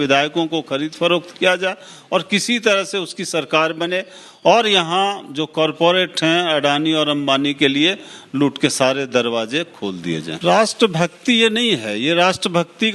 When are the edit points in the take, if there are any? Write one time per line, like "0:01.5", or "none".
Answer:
0:10.3